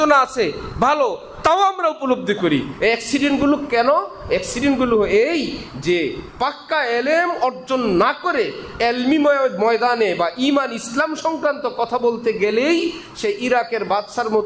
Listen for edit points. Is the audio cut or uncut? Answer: uncut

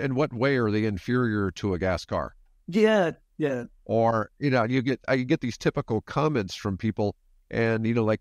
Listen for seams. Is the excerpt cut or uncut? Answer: uncut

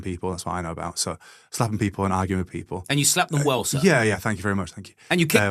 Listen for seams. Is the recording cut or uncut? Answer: uncut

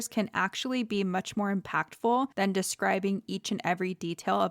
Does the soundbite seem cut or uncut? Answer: cut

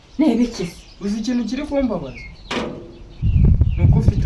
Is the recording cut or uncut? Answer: uncut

